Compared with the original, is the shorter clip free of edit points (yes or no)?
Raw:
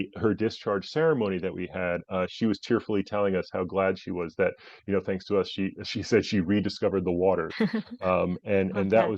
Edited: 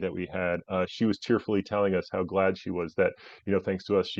yes